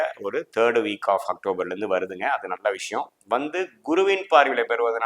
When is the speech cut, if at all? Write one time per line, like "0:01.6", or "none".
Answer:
none